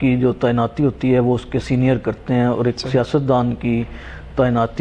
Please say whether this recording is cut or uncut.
uncut